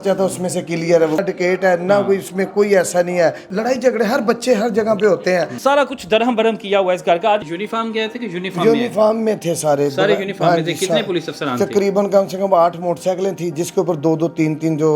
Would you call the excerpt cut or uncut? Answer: cut